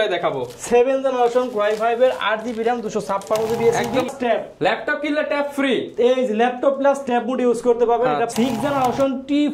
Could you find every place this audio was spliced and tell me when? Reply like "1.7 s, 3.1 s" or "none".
4.1 s, 8.3 s